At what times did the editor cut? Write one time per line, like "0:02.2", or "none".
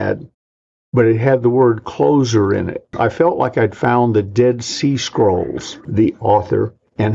0:02.9
0:05.9